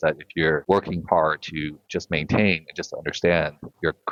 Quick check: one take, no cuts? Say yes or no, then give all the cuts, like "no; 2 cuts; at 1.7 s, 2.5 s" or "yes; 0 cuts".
yes; 0 cuts